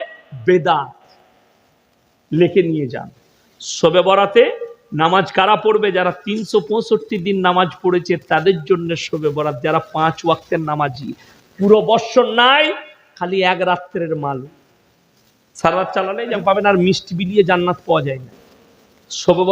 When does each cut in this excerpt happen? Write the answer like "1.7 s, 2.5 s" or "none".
16.3 s